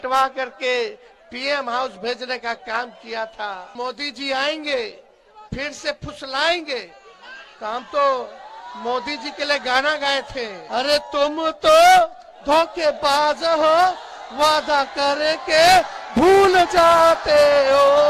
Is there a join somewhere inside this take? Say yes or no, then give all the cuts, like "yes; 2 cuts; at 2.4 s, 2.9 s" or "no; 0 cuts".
yes; 2 cuts; at 3.7 s, 10.6 s